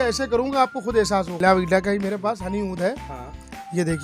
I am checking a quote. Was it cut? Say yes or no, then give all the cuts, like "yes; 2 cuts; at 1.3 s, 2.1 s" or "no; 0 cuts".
yes; 1 cut; at 1.4 s